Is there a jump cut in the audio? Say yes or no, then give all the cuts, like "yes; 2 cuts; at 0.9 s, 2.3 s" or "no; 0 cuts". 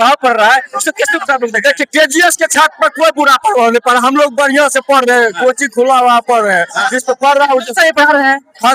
no; 0 cuts